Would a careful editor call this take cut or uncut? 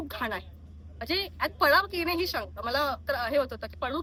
uncut